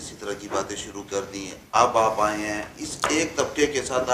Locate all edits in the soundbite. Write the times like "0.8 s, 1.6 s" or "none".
none